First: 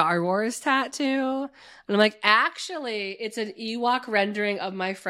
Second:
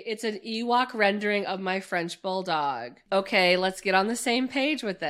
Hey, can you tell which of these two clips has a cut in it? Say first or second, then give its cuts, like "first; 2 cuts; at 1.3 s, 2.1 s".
second; 1 cut; at 2.9 s